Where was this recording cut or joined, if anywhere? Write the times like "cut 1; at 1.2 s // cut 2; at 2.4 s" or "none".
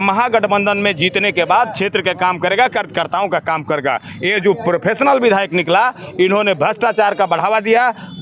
none

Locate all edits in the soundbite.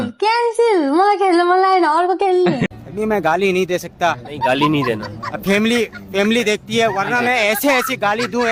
none

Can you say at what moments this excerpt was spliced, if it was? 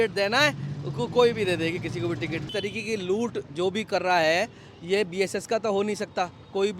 cut 1; at 2.5 s

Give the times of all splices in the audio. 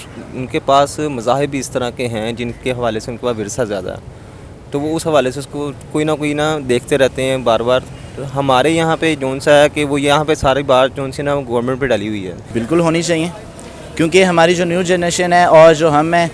cut 1; at 12.4 s

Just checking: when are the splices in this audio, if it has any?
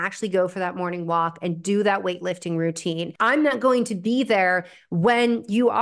cut 1; at 3.1 s

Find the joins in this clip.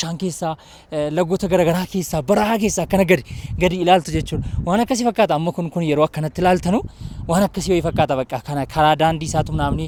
none

